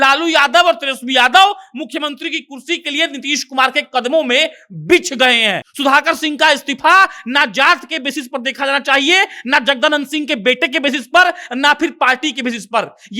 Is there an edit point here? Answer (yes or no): yes